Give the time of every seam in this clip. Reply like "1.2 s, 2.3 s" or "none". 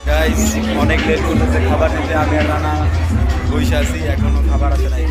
none